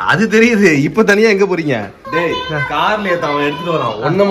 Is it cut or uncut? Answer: cut